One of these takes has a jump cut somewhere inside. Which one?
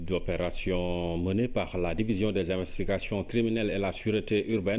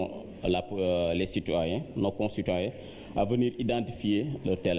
second; 1 cut; at 1.3 s

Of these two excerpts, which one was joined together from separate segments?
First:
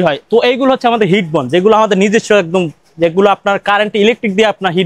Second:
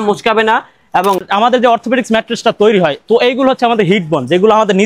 second; 1 cut; at 1.2 s

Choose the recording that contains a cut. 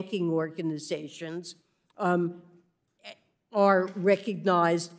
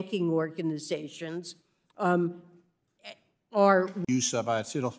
first; 1 cut; at 4.0 s

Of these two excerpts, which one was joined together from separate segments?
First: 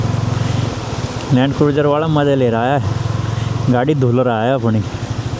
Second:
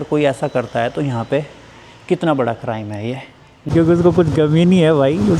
second; 1 cut; at 3.7 s

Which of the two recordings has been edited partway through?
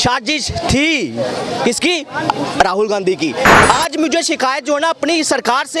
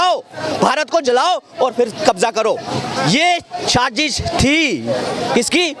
first; 1 cut; at 3.6 s

